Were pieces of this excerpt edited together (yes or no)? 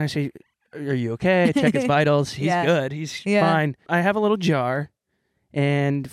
yes